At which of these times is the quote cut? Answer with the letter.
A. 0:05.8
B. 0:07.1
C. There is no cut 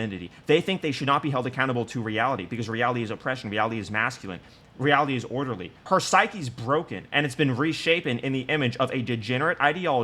A